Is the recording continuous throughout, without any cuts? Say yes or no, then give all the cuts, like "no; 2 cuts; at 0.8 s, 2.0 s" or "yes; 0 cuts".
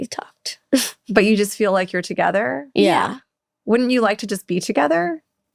yes; 0 cuts